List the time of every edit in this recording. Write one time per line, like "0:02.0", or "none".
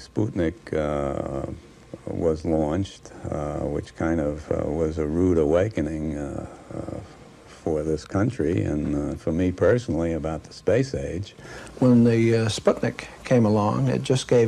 0:06.0